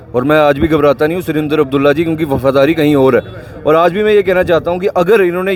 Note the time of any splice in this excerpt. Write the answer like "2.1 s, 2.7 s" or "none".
none